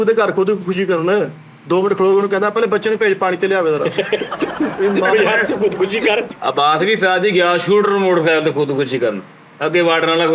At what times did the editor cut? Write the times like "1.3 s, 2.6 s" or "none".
6.3 s